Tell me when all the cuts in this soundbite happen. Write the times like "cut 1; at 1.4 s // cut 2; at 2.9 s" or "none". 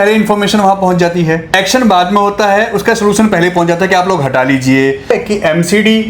cut 1; at 1.5 s // cut 2; at 5.1 s

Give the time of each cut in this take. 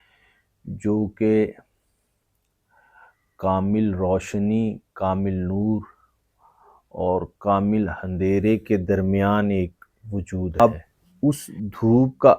cut 1; at 10.6 s

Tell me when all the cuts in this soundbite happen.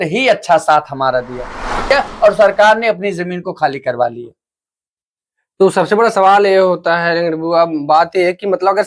cut 1; at 1.9 s

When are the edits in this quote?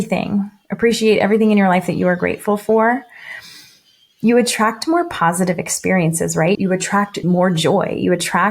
cut 1; at 7.2 s

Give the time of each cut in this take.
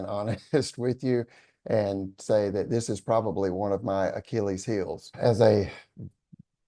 cut 1; at 5.0 s

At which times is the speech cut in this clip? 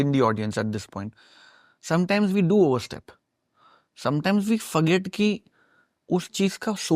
none

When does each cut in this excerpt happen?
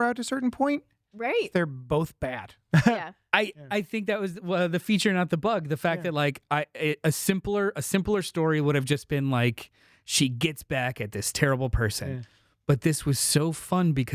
none

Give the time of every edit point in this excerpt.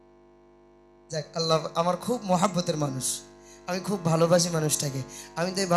cut 1; at 1.1 s

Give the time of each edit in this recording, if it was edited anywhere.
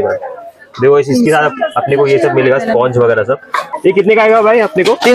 cut 1; at 3.7 s

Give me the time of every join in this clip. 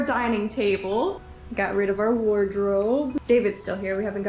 cut 1; at 1.2 s // cut 2; at 3.2 s

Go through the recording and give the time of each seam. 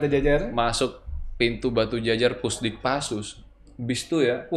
none

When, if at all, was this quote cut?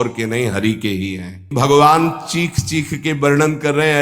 cut 1; at 1.5 s

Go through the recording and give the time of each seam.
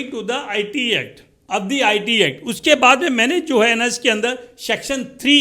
cut 1; at 1.4 s

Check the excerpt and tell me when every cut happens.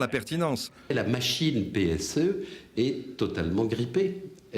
cut 1; at 0.9 s

